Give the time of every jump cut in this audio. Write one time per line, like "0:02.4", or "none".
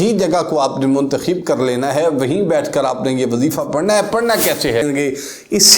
0:04.8